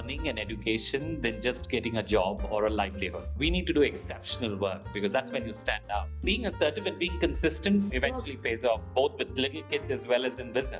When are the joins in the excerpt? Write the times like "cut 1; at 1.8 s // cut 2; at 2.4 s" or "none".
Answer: cut 1; at 3.3 s // cut 2; at 6.1 s // cut 3; at 7.9 s

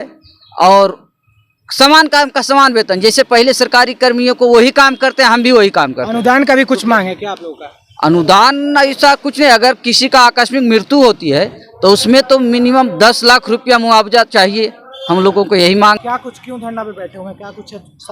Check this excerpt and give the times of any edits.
cut 1; at 16.0 s

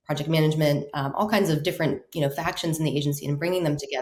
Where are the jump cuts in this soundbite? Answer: none

